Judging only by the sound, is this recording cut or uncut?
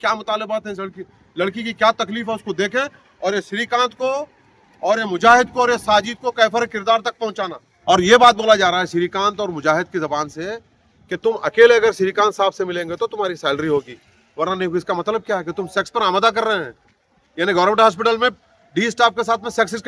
cut